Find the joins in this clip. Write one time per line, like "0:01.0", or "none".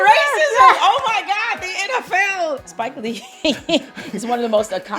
0:02.6